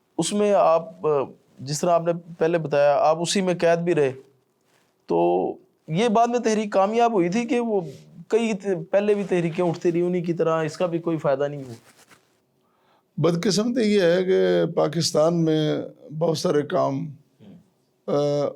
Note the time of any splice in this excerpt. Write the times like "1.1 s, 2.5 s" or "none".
none